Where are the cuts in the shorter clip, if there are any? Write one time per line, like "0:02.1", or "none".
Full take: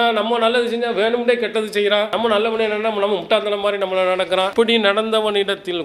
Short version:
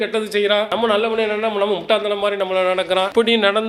none

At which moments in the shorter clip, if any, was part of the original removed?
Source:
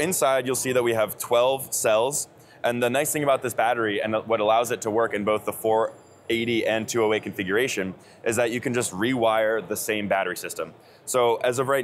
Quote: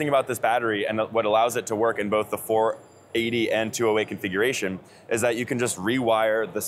none

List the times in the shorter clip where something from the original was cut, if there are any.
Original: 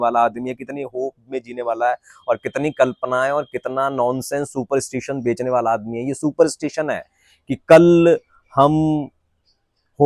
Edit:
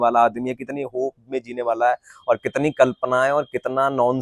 none

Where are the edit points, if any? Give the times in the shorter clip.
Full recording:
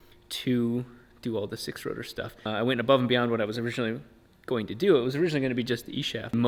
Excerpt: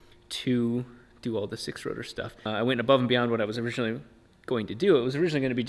none

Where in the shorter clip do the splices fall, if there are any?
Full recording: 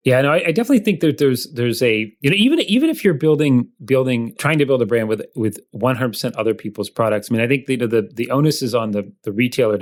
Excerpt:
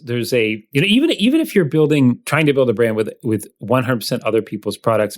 0:02.3

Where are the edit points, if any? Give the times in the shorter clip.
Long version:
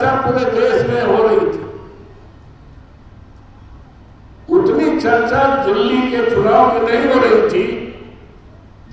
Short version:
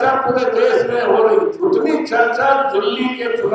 0:01.6

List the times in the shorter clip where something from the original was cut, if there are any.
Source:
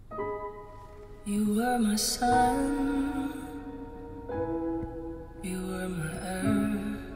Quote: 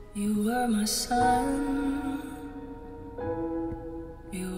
none

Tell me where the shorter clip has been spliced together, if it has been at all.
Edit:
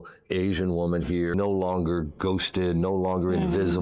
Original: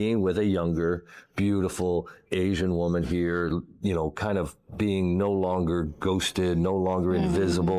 0:01.3

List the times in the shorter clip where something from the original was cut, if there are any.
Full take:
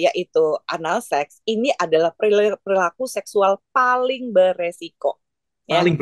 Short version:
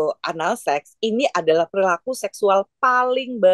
0:01.7

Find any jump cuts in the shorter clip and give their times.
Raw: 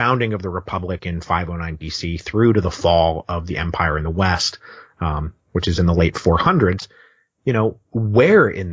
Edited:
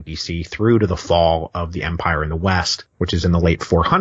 0:02.8

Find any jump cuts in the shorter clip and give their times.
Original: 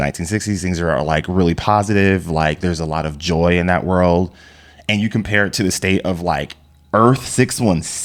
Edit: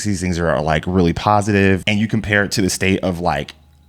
0:01.8

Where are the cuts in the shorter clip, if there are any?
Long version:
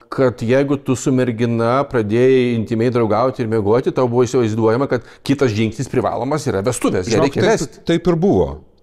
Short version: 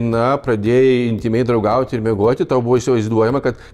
none

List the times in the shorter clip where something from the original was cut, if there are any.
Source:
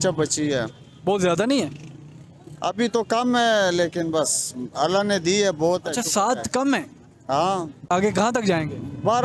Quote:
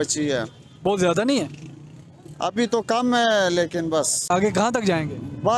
0:04.2

